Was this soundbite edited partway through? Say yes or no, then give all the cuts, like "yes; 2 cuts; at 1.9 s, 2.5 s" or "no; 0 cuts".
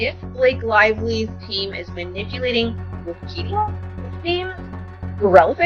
no; 0 cuts